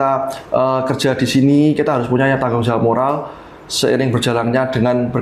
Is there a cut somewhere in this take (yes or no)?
no